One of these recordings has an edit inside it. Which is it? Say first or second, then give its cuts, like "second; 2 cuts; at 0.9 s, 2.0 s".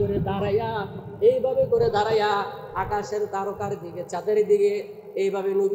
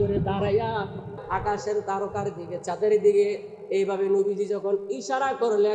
second; 1 cut; at 1.1 s